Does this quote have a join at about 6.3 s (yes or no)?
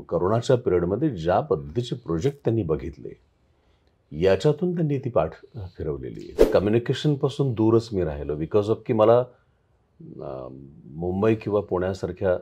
yes